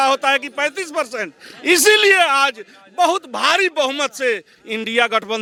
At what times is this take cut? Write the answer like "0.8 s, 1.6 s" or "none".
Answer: none